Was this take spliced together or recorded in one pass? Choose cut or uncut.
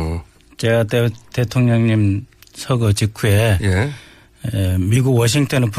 cut